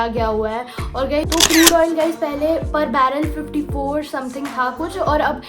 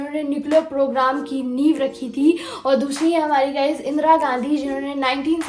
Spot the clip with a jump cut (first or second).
first